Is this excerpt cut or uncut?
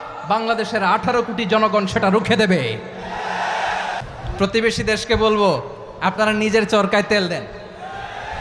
cut